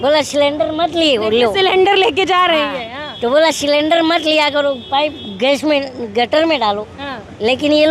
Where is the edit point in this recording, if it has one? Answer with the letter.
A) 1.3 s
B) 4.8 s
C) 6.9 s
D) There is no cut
D